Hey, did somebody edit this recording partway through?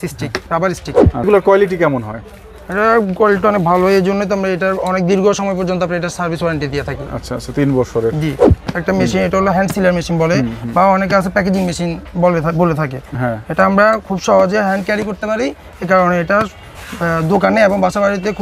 yes; 2 cuts; at 1.2 s, 8.6 s

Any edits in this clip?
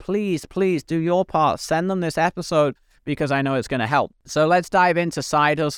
yes; 1 cut; at 4.2 s

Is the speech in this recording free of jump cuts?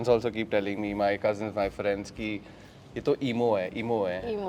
yes; 0 cuts

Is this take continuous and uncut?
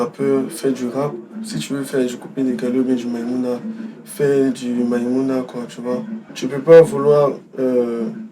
no; 1 cut; at 6.2 s

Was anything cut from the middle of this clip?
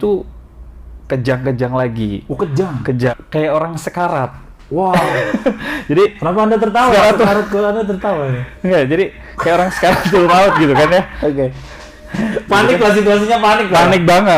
yes; 1 cut; at 3.1 s

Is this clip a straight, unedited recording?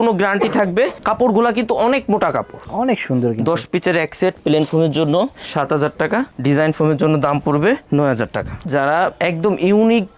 no; 2 cuts; at 2.6 s, 8.6 s

